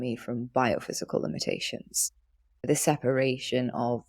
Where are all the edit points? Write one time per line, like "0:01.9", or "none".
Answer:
0:02.7